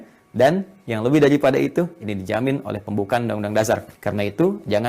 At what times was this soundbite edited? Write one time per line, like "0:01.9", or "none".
0:03.9